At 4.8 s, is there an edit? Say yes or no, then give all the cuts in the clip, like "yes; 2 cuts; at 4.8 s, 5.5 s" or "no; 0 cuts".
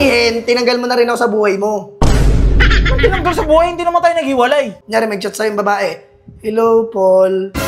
yes; 1 cut; at 4.8 s